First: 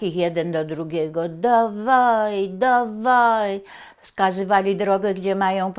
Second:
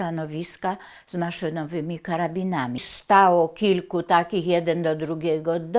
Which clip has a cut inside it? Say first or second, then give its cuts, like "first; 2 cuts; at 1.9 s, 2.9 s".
second; 1 cut; at 2.8 s